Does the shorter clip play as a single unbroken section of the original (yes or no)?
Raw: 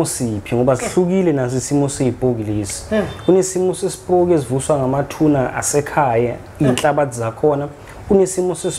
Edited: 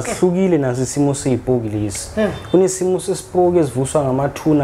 yes